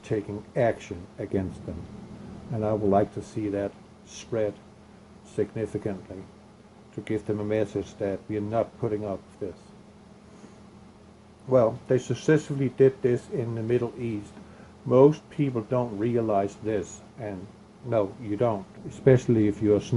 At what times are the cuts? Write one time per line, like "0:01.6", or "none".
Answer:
0:09.2